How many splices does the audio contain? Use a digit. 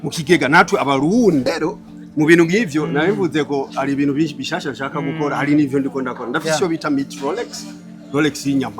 1